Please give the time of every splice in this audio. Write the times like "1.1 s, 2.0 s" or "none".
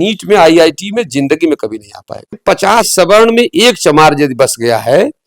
2.4 s